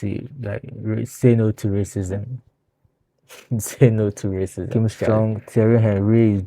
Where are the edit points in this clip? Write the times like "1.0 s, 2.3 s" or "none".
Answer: 4.7 s

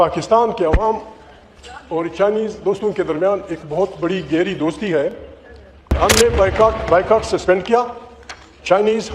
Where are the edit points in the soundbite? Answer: 5.9 s

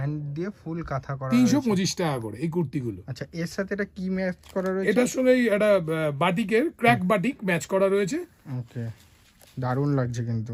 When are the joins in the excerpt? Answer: none

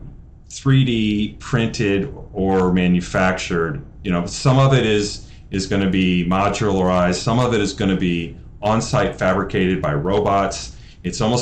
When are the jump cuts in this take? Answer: none

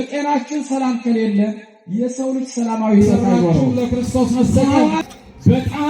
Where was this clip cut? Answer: 3.7 s

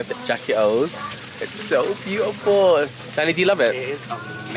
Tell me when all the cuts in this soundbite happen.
none

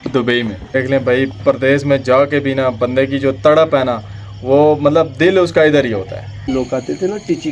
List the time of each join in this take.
0.8 s, 6.4 s

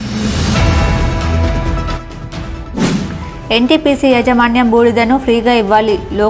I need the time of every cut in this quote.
0.9 s, 2.9 s

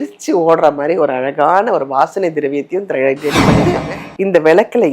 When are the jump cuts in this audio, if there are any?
3.7 s

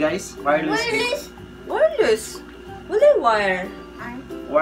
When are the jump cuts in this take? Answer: none

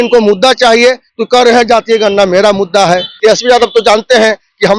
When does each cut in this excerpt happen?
3.1 s

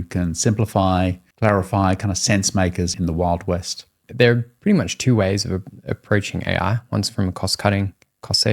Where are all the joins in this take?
1.2 s, 2.9 s, 4.0 s

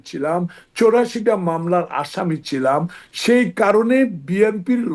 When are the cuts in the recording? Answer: none

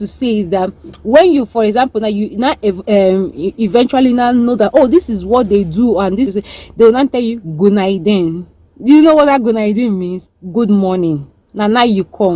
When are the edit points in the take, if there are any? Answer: 6.3 s

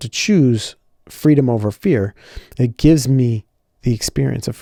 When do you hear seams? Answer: none

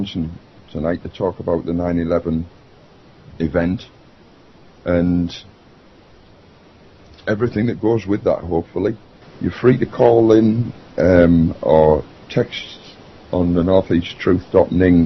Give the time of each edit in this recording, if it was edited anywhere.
13.9 s

